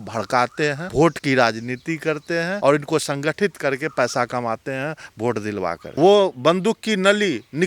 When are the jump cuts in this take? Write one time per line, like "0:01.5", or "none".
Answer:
0:00.8
0:02.6
0:05.8